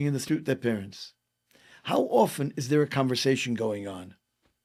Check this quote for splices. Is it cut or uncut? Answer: uncut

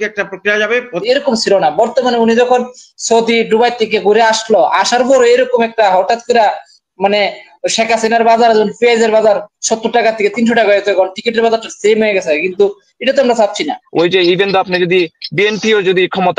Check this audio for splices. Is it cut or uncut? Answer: cut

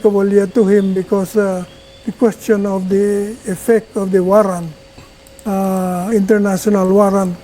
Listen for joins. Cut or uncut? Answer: uncut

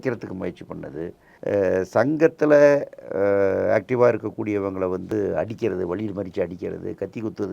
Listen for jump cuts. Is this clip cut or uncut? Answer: cut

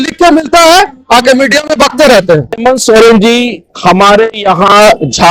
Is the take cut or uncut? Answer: cut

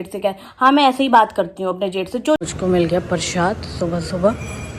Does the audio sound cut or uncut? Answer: cut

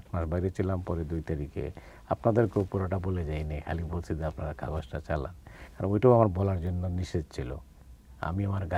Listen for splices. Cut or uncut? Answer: uncut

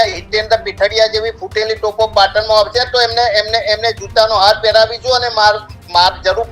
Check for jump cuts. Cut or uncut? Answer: uncut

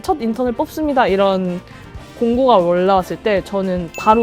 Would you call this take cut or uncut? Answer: uncut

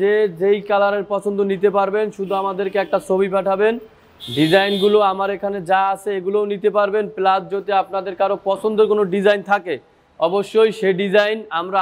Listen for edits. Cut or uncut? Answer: uncut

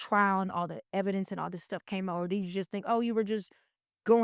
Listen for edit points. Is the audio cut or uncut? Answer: uncut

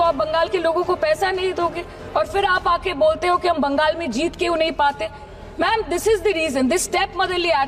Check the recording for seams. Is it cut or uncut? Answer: uncut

